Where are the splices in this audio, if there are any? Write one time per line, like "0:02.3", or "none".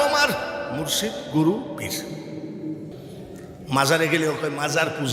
0:02.9